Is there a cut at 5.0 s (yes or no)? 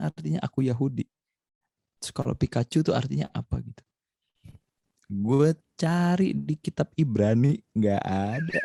no